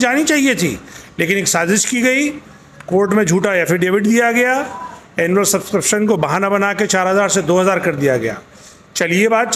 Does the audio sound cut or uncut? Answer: uncut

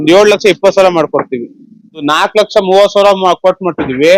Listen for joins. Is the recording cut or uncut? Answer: cut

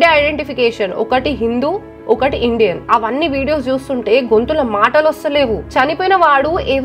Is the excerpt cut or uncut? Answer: uncut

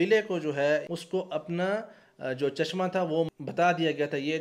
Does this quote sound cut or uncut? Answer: cut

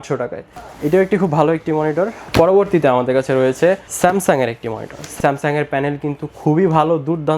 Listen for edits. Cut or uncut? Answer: cut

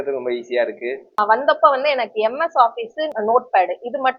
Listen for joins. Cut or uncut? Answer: cut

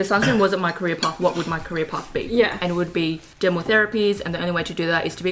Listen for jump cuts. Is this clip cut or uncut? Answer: uncut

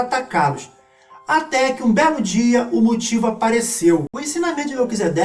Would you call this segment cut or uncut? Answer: cut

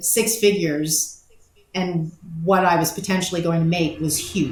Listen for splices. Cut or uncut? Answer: uncut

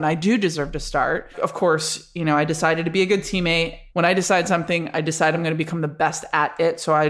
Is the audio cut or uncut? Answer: cut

